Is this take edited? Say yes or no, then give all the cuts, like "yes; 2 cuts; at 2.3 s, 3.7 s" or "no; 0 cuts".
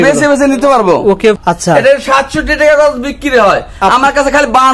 yes; 1 cut; at 1.2 s